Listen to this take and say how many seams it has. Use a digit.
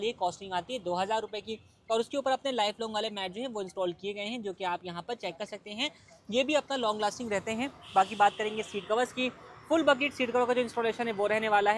0